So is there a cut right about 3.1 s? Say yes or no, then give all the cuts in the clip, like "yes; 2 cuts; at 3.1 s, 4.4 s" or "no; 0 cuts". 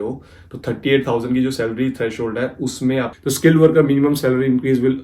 yes; 1 cut; at 3.1 s